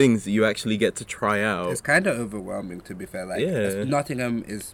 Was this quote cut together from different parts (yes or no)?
no